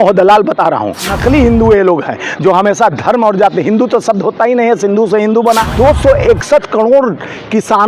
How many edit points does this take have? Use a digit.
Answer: 2